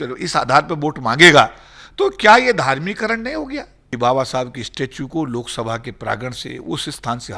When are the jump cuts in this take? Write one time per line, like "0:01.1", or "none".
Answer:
0:03.8